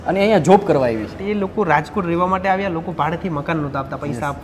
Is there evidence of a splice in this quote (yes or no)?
yes